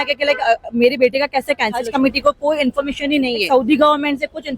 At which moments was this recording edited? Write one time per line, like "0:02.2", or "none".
0:01.9
0:03.4